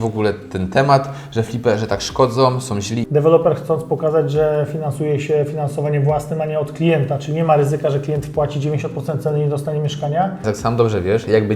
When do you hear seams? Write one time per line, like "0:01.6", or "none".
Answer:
0:03.0
0:10.5